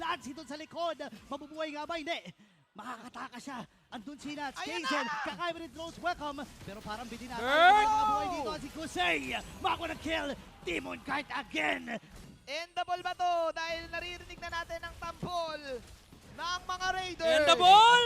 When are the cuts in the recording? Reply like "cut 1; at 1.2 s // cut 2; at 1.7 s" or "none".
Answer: cut 1; at 12.2 s